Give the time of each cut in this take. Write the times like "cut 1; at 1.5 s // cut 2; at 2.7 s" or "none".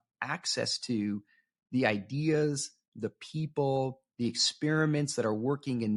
none